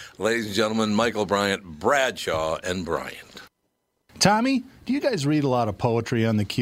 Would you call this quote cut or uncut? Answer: cut